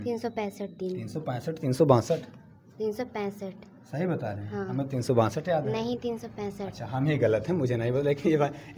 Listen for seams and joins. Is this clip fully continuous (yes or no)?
yes